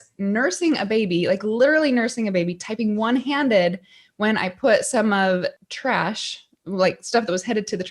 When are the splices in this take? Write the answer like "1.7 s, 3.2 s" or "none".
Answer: 5.6 s